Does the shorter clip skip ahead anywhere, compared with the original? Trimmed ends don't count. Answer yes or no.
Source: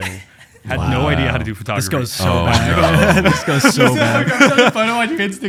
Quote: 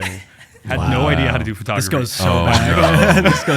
no